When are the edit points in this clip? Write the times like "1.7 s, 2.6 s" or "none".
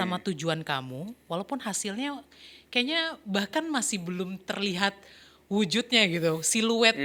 none